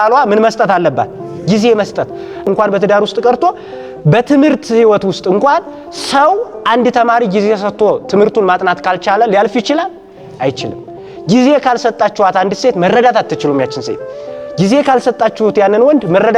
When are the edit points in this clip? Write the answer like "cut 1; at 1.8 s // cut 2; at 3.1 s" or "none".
cut 1; at 2.5 s